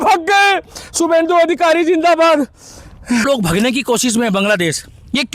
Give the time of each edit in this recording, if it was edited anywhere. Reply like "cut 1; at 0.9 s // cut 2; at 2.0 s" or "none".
cut 1; at 3.2 s